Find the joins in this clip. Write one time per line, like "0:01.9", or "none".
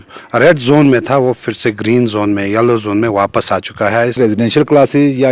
0:04.2